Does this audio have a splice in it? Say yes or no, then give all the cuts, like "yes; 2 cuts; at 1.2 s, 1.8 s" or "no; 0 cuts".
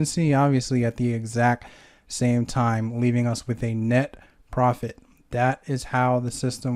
no; 0 cuts